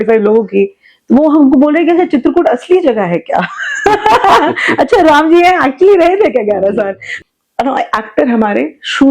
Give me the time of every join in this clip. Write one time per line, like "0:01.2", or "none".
0:07.1